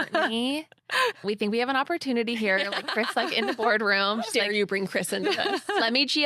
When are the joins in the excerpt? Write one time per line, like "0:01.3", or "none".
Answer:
0:01.2